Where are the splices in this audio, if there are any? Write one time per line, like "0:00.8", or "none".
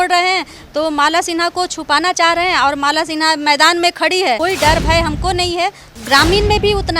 0:04.4
0:05.9